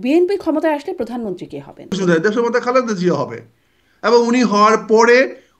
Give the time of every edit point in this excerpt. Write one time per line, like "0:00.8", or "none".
0:01.9